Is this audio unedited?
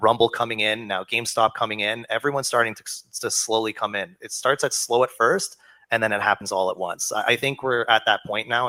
yes; 0 cuts

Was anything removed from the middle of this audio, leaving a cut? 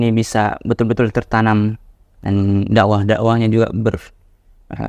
no; 0 cuts

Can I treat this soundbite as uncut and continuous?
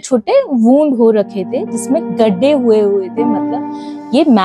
yes; 0 cuts

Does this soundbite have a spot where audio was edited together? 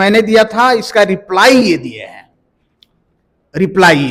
no; 0 cuts

